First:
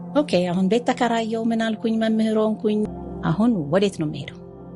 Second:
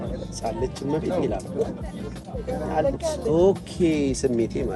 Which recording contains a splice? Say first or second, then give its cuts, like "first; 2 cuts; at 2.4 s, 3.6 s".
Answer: first; 1 cut; at 2.9 s